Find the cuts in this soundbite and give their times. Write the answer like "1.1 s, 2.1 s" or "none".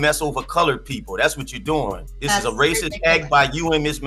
2.1 s